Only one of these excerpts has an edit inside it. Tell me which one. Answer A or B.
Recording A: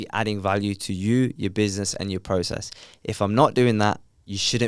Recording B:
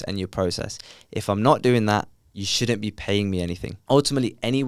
B